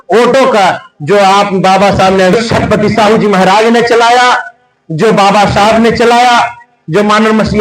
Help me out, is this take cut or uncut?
cut